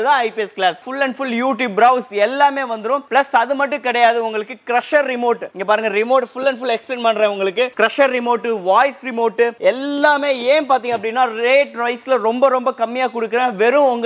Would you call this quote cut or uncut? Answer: uncut